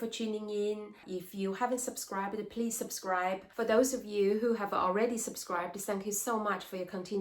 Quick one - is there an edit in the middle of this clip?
yes; 2 cuts; at 1.0 s, 3.5 s

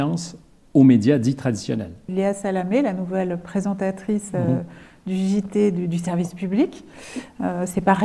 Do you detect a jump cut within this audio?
yes; 1 cut; at 2.1 s

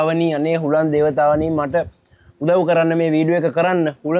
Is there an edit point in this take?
no; 0 cuts

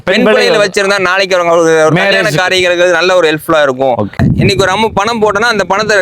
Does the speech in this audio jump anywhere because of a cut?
yes; 1 cut; at 4.2 s

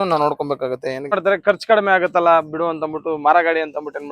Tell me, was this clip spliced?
yes; 1 cut; at 1.1 s

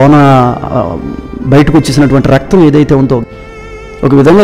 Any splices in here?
yes; 1 cut; at 3.2 s

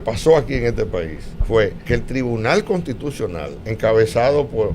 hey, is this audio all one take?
no; 2 cuts; at 1.8 s, 3.6 s

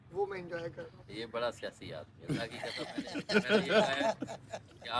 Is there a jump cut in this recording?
no; 0 cuts

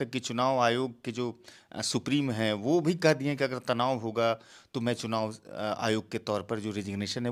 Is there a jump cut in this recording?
no; 0 cuts

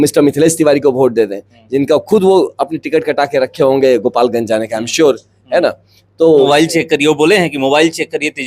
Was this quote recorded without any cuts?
no; 1 cut; at 6.5 s

